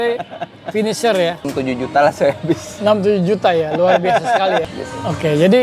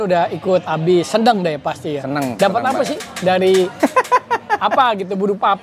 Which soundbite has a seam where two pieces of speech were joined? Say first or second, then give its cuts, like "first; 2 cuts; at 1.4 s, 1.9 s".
first; 2 cuts; at 1.5 s, 4.7 s